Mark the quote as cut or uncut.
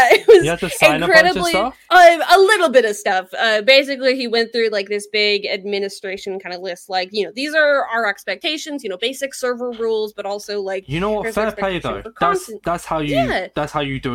uncut